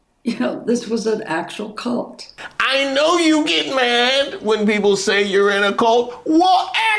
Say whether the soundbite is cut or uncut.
cut